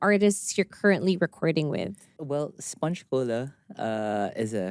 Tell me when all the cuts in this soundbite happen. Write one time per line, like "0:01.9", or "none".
0:02.1